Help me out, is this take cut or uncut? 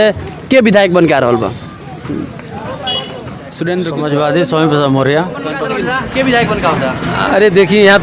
cut